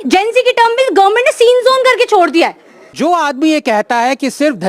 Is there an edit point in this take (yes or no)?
yes